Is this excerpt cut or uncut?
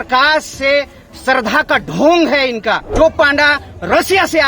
cut